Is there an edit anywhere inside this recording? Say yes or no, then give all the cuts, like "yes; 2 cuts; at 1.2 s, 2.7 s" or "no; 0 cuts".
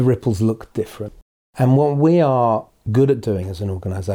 yes; 1 cut; at 2.8 s